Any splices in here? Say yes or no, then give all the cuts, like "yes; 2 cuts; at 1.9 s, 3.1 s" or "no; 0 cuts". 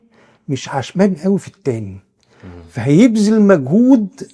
no; 0 cuts